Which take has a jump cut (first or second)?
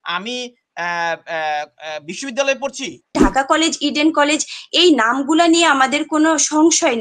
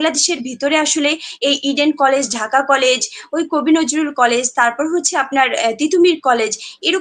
first